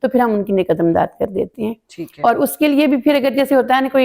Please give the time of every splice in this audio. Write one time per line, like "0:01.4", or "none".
none